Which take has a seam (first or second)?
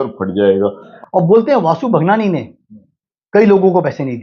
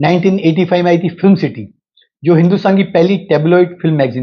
first